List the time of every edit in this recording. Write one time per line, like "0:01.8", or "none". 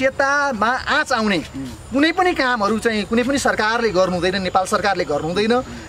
none